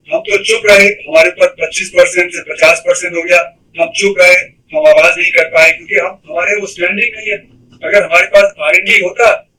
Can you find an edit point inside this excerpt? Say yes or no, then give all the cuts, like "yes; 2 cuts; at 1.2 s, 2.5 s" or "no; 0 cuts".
no; 0 cuts